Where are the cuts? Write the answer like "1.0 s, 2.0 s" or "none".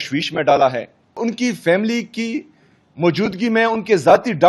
1.2 s

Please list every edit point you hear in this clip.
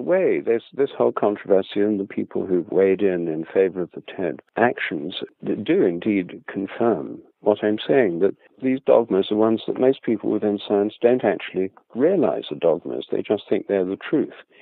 4.4 s, 5.2 s, 8.5 s

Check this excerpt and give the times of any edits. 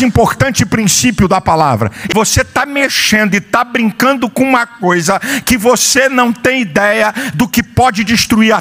2.0 s, 7.2 s

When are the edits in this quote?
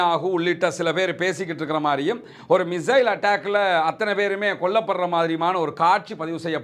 none

